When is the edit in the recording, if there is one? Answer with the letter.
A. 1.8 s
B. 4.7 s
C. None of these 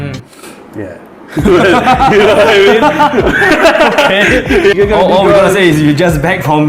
B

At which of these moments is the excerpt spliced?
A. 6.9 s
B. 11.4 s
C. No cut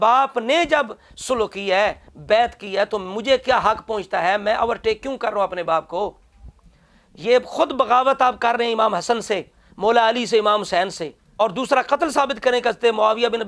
B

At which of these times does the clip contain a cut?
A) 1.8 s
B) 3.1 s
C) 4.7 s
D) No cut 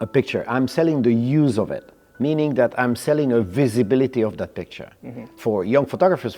D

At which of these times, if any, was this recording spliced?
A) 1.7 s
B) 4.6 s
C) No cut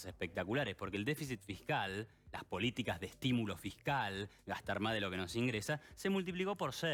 C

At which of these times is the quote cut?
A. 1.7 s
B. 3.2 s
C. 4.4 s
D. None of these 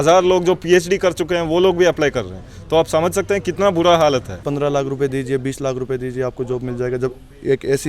C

